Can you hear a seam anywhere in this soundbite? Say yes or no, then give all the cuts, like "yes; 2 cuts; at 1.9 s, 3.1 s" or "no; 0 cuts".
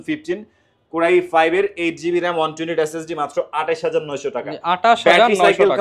no; 0 cuts